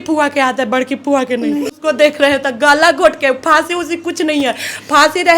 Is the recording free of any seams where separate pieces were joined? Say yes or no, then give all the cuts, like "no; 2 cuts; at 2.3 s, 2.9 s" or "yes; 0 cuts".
no; 1 cut; at 1.7 s